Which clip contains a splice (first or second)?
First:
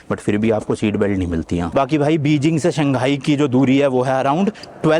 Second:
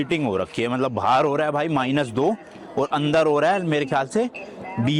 first